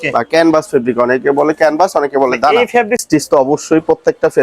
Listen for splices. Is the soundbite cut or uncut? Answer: cut